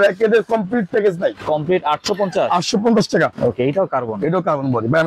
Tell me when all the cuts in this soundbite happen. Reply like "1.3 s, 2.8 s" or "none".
1.4 s, 3.3 s